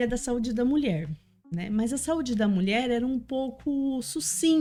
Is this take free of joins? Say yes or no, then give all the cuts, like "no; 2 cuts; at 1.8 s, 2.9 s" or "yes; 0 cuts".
yes; 0 cuts